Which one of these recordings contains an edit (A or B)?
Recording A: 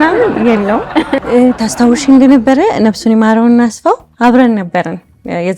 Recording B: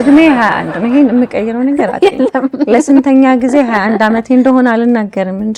A